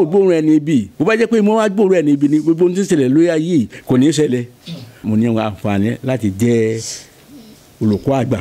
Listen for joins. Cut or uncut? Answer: cut